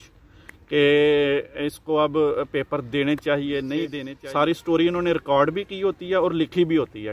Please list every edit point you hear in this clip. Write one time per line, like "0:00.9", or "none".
0:04.1